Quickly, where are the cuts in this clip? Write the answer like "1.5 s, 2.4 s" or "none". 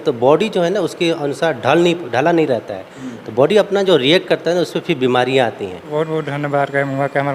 5.8 s